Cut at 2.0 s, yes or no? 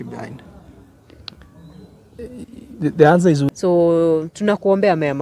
no